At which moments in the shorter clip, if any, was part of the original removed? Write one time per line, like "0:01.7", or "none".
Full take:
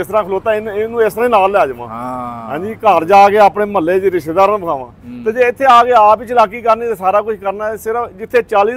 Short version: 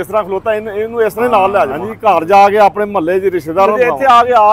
0:01.8
0:03.7